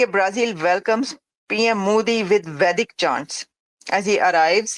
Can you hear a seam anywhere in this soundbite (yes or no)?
no